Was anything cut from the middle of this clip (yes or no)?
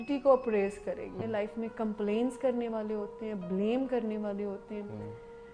yes